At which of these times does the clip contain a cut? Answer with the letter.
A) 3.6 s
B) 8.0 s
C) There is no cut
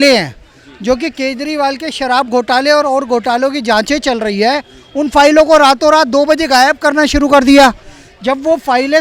C